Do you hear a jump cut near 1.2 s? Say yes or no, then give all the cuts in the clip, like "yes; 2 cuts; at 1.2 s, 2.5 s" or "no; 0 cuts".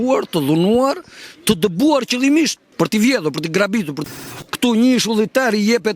no; 2 cuts; at 2.6 s, 4.0 s